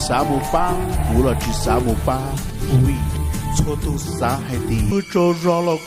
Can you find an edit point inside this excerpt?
yes; 1 cut; at 4.9 s

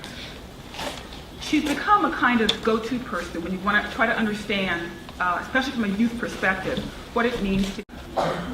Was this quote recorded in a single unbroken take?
no; 1 cut; at 2.8 s

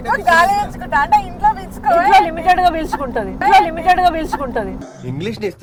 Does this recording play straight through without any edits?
yes; 0 cuts

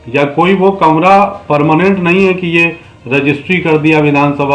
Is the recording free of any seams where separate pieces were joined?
yes; 0 cuts

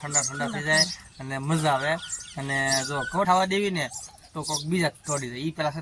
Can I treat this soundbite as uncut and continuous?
no; 1 cut; at 3.3 s

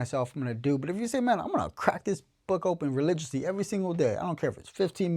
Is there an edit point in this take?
no; 0 cuts

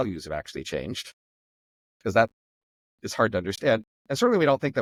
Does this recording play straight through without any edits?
yes; 0 cuts

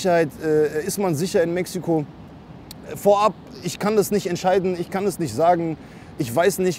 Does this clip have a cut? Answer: no; 0 cuts

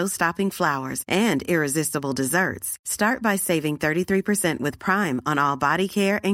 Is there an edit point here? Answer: no; 0 cuts

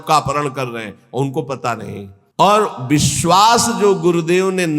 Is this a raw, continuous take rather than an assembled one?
no; 1 cut; at 2.2 s

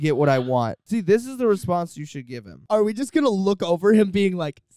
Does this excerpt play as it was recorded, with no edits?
no; 2 cuts; at 0.8 s, 2.6 s

